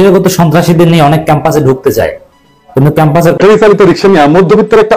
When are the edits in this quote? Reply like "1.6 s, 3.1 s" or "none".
3.4 s